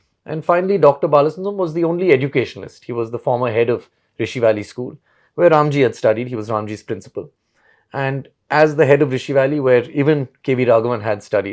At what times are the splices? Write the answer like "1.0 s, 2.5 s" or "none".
none